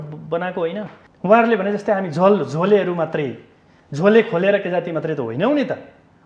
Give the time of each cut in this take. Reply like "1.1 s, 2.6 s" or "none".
1.0 s